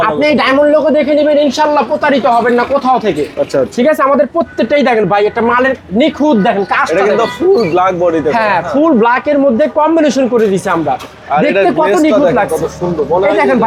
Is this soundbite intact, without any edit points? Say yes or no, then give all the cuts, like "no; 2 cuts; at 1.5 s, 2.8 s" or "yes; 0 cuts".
yes; 0 cuts